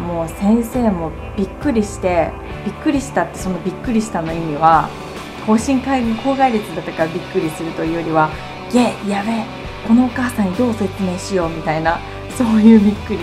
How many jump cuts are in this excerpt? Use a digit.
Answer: 0